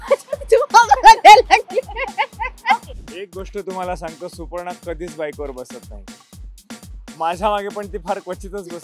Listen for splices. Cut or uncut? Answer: cut